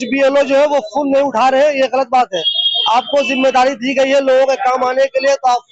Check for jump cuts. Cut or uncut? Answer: uncut